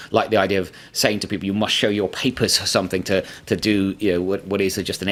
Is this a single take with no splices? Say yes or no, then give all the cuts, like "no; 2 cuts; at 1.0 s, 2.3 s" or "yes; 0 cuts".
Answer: yes; 0 cuts